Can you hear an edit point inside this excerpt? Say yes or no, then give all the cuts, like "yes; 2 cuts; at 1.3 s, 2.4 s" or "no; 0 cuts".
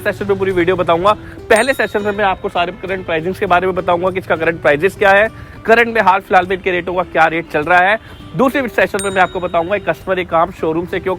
no; 0 cuts